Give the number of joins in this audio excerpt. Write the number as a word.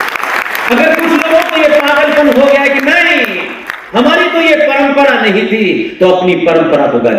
zero